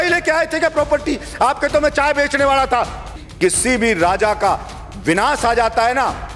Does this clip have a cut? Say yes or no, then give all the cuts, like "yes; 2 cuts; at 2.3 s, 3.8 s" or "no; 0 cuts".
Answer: yes; 1 cut; at 3.2 s